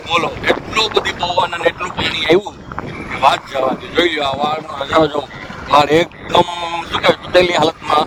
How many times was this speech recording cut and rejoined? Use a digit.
0